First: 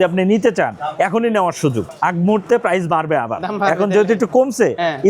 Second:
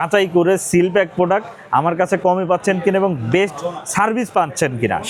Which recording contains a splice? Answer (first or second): first